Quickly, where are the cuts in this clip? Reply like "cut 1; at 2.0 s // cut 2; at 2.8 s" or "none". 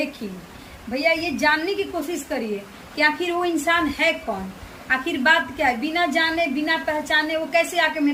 none